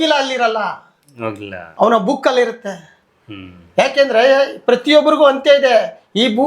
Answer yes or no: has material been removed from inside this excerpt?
no